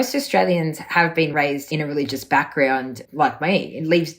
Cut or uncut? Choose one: cut